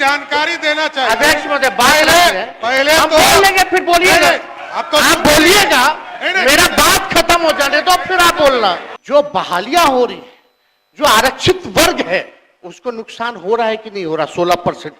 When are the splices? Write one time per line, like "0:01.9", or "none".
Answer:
0:08.9